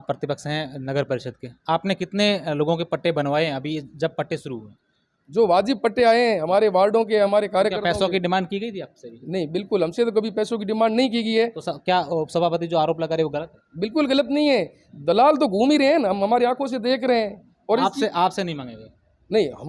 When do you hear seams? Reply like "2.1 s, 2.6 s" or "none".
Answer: none